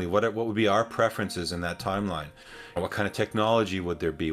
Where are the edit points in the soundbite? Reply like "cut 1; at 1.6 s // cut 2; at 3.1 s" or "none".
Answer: cut 1; at 2.8 s